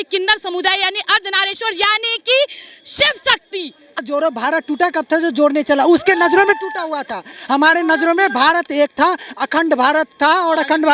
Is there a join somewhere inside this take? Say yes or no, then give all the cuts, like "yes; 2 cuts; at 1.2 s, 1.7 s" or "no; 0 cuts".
yes; 1 cut; at 4.0 s